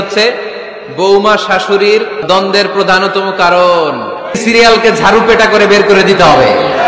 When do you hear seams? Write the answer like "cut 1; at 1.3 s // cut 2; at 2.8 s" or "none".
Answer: cut 1; at 2.2 s // cut 2; at 4.4 s